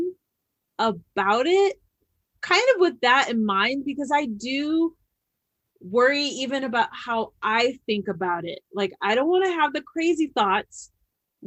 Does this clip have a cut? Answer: no; 0 cuts

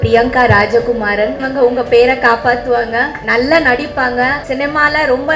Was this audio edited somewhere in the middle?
yes; 3 cuts; at 1.4 s, 3.2 s, 4.4 s

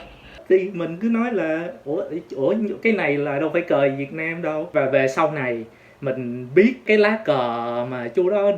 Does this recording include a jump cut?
yes; 2 cuts; at 4.7 s, 6.8 s

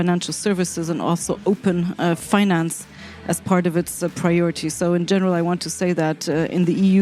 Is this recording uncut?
yes; 0 cuts

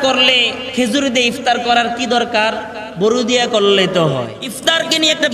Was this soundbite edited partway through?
yes; 1 cut; at 4.4 s

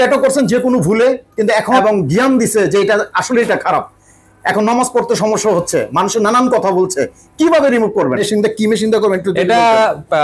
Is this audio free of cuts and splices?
no; 2 cuts; at 1.7 s, 8.2 s

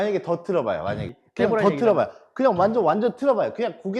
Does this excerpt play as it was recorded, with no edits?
no; 1 cut; at 1.1 s

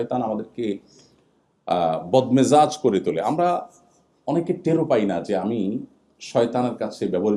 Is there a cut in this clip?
no; 0 cuts

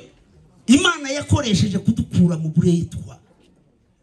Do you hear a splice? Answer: no; 0 cuts

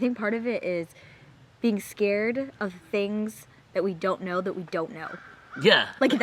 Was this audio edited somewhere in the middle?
no; 0 cuts

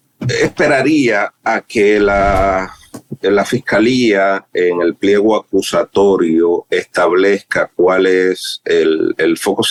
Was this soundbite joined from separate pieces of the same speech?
no; 0 cuts

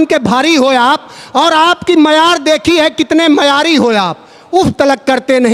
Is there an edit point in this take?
no; 0 cuts

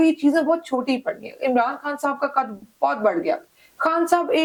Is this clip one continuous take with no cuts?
yes; 0 cuts

